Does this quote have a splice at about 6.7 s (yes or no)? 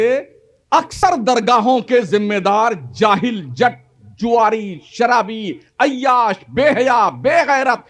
no